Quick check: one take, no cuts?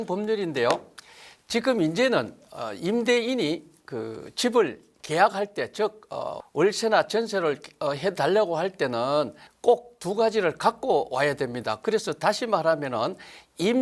no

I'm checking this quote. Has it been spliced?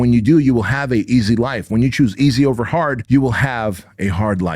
yes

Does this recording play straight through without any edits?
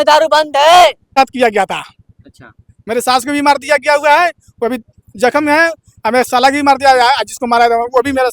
no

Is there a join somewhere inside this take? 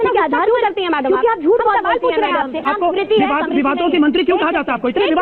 yes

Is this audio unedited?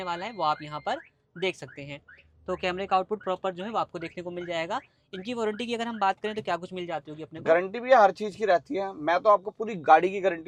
yes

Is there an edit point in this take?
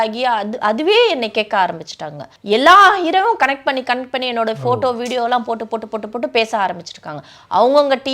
yes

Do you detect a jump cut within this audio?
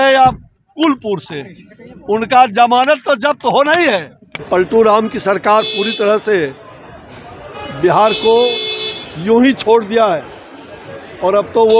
yes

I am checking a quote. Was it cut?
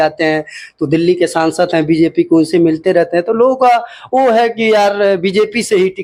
no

